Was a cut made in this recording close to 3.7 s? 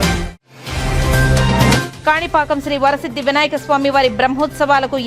no; 1 cut; at 1.9 s

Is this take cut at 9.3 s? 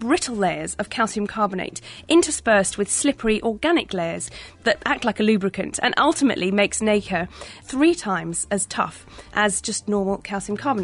yes; 3 cuts; at 4.5 s, 7.6 s, 9.3 s

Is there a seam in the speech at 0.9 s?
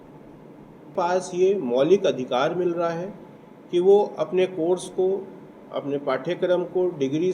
yes; 1 cut; at 0.9 s

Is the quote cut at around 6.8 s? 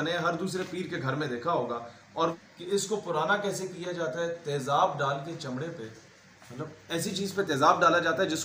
no; 1 cut; at 2.5 s

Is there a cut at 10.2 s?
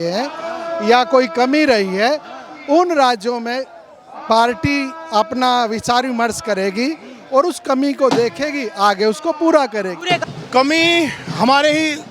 yes; 1 cut; at 10.2 s

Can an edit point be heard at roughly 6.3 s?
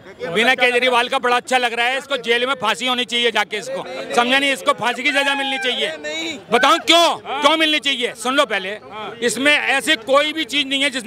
no; 0 cuts

